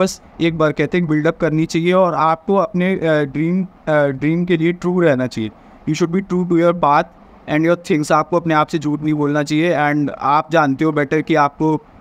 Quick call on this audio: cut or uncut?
uncut